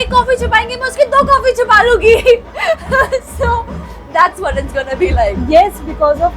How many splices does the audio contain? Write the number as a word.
zero